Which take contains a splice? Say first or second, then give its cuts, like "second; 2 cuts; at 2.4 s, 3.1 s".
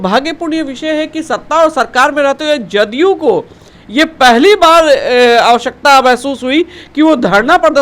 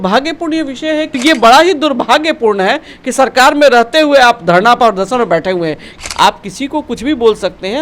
second; 2 cuts; at 1.2 s, 5.9 s